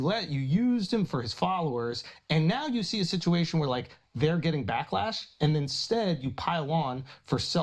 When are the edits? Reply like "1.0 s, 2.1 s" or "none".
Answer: none